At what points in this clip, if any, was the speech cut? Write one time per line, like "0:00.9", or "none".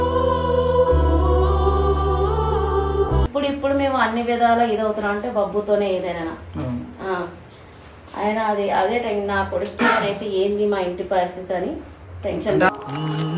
0:03.3